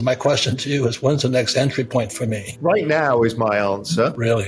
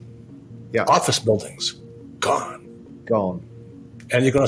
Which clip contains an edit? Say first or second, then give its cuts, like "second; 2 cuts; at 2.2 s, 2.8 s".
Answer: first; 1 cut; at 2.5 s